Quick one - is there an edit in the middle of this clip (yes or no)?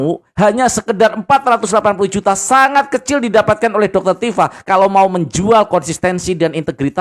no